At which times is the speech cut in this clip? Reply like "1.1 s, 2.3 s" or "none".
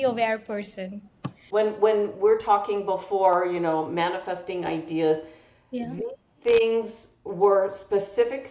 1.3 s

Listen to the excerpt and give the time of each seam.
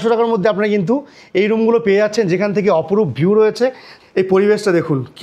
3.9 s

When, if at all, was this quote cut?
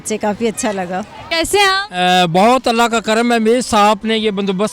none

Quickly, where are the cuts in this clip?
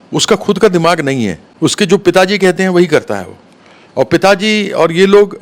1.4 s

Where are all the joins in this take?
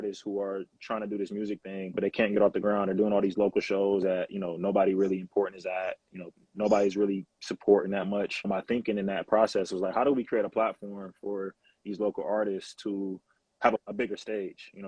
8.4 s

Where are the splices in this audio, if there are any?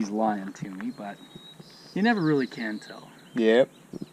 none

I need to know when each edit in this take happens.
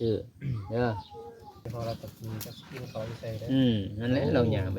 1.6 s

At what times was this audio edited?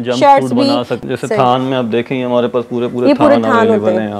0.9 s

